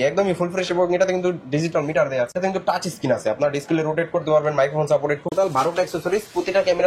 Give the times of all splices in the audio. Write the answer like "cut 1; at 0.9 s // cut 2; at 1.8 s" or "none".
cut 1; at 2.3 s // cut 2; at 5.4 s